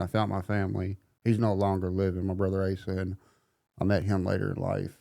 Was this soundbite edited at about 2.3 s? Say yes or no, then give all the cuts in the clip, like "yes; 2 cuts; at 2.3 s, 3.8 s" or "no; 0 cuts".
no; 0 cuts